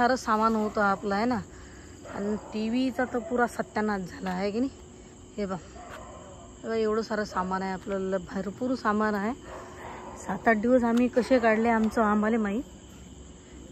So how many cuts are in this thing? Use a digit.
0